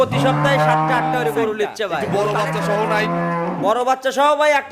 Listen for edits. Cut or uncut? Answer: cut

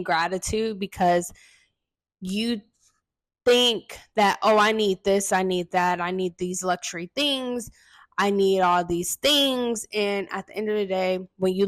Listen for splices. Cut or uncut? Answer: uncut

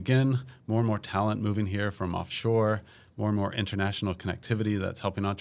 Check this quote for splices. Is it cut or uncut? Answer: uncut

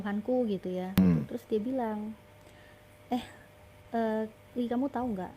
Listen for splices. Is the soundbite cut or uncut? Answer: cut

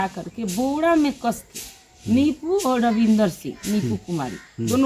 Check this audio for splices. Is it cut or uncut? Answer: uncut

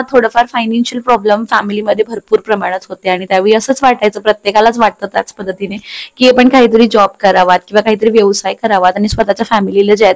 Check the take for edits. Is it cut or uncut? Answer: uncut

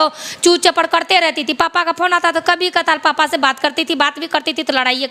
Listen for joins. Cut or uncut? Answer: uncut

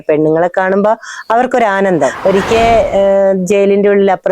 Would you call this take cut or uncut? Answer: cut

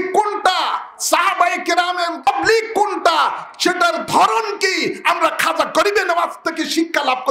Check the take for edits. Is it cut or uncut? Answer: cut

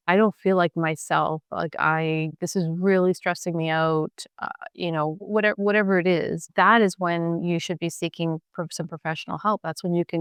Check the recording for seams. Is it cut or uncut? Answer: uncut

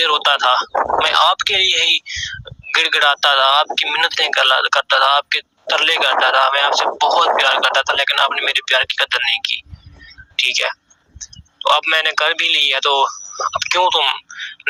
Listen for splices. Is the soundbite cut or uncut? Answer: uncut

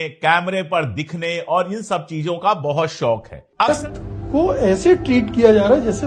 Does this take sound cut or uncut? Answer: cut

